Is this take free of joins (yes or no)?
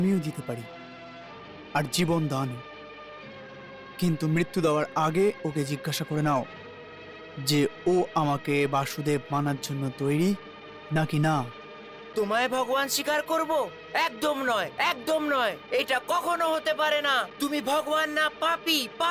yes